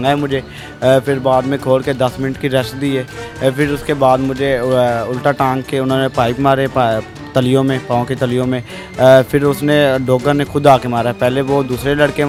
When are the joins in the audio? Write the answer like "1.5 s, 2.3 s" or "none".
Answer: none